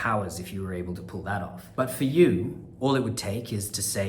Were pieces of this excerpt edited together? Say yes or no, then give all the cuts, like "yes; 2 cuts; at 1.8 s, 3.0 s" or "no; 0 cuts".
yes; 2 cuts; at 1.6 s, 2.6 s